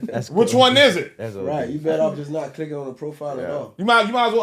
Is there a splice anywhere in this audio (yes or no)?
no